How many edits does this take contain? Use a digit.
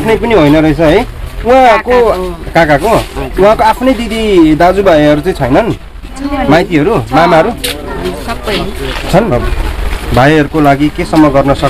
1